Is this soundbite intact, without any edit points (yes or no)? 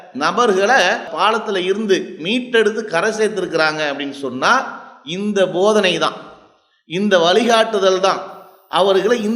yes